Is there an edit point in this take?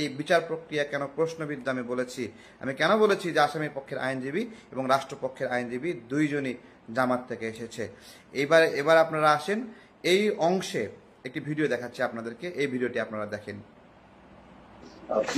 no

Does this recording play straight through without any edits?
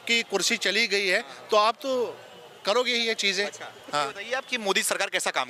yes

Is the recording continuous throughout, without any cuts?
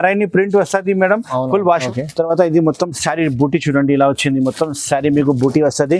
no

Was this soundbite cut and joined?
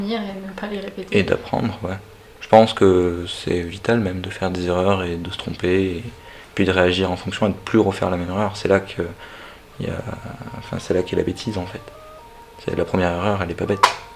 no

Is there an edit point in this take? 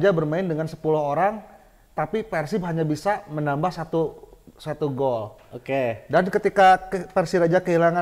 no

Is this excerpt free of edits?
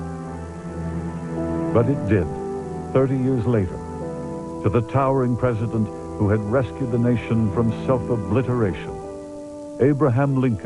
yes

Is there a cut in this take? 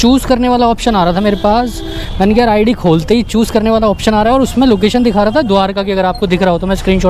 no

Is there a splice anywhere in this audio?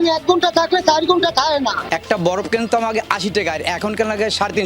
yes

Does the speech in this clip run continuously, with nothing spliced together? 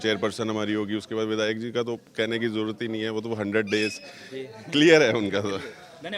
yes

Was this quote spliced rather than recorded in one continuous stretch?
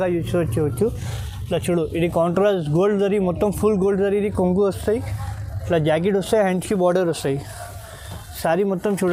no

